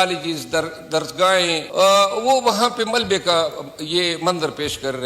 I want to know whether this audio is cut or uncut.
cut